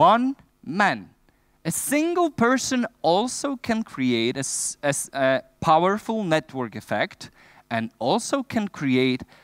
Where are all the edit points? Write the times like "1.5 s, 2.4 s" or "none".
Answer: none